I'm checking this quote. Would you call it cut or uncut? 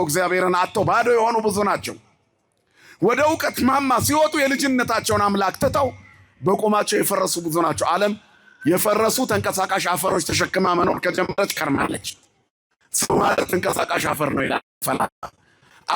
uncut